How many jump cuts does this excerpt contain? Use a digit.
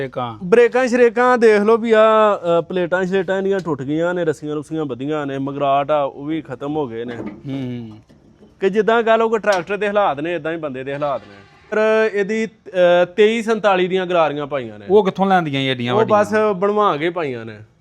1